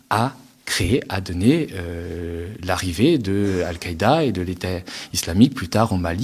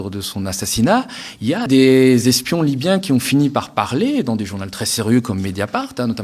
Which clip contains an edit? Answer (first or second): second